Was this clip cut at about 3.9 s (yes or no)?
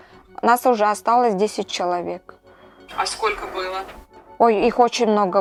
no